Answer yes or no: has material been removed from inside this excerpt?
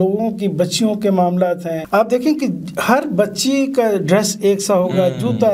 yes